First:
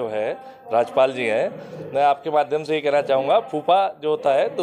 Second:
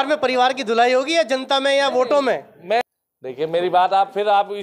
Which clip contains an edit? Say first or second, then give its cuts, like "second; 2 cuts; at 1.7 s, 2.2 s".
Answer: second; 1 cut; at 2.8 s